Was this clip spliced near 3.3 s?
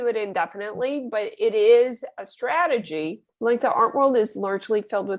yes; 1 cut; at 3.3 s

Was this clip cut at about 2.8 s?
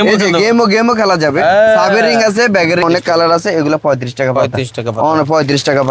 yes; 1 cut; at 2.8 s

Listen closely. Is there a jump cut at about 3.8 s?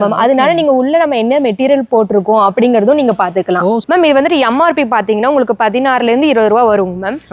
yes; 1 cut; at 3.8 s

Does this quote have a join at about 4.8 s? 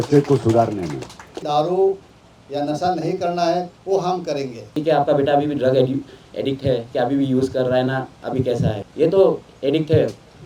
yes; 3 cuts; at 1.4 s, 4.8 s, 8.8 s

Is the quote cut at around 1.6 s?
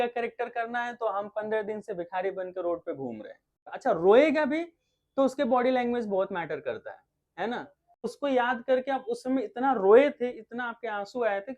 no; 2 cuts; at 3.7 s, 8.0 s

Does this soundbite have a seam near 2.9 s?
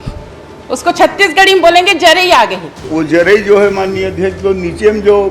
yes; 1 cut; at 2.9 s

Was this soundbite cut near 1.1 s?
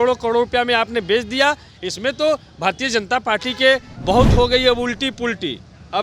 no; 1 cut; at 3.9 s

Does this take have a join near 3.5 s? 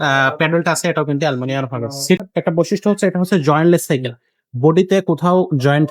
no; 1 cut; at 2.2 s

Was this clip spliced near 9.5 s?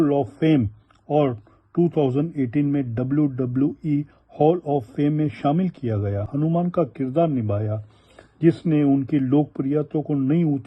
no; 1 cut; at 6.3 s

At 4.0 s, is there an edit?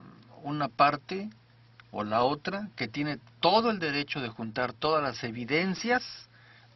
yes; 1 cut; at 4.0 s

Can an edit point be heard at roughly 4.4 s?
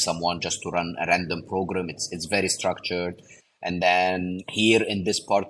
yes; 1 cut; at 4.4 s

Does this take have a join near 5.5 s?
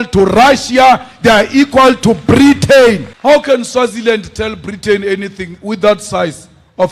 no; 1 cut; at 3.1 s

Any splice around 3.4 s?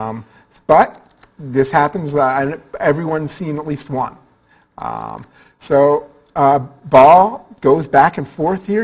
no; 1 cut; at 5.2 s

